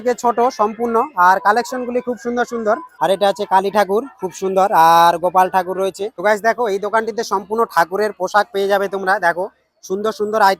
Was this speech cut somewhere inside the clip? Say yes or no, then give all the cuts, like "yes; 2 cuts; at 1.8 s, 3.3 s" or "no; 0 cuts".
yes; 2 cuts; at 2.9 s, 6.1 s